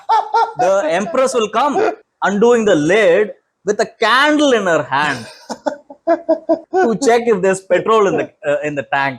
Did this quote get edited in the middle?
yes; 2 cuts; at 2.0 s, 6.6 s

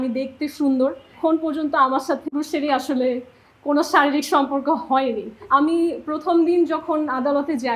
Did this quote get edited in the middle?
yes; 3 cuts; at 1.1 s, 2.3 s, 5.4 s

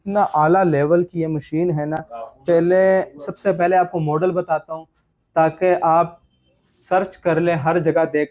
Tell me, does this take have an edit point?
no; 0 cuts

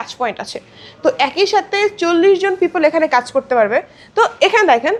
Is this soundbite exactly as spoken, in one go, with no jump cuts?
yes; 0 cuts

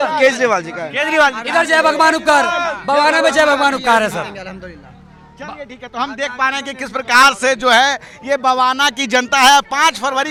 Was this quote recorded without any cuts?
yes; 0 cuts

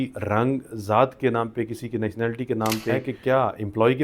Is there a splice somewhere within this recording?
yes; 1 cut; at 3.1 s

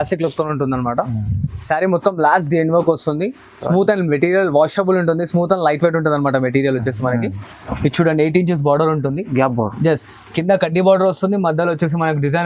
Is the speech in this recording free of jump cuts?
yes; 0 cuts

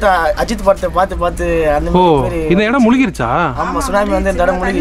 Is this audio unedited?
yes; 0 cuts

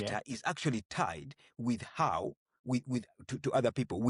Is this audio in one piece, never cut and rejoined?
yes; 0 cuts

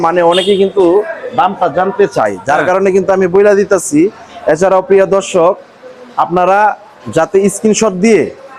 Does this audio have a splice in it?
no; 0 cuts

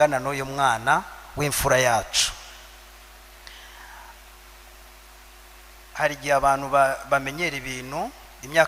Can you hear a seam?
no; 0 cuts

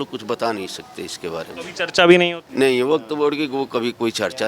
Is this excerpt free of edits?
no; 1 cut; at 2.4 s

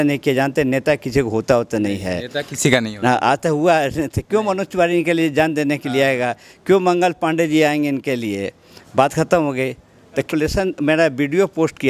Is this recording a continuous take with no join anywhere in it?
no; 1 cut; at 10.3 s

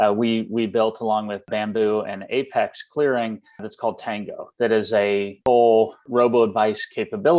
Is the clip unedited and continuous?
no; 4 cuts; at 1.5 s, 3.7 s, 5.3 s, 6.0 s

